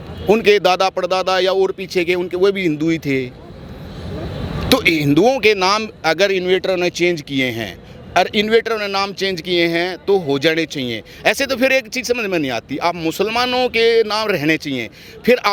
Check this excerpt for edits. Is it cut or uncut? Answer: uncut